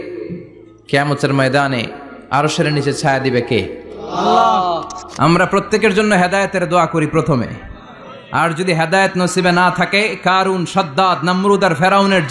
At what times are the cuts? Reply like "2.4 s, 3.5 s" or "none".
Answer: 5.1 s